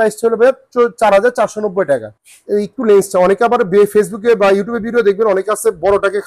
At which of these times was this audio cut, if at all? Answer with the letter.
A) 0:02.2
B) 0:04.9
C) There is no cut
A